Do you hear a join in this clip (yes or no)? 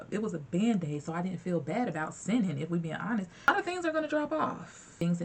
no